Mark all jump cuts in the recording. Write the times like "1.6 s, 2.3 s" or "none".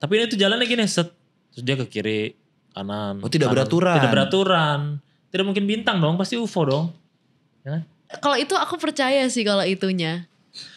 8.2 s